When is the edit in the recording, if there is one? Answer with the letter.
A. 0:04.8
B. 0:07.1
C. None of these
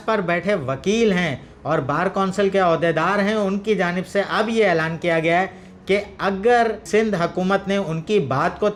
C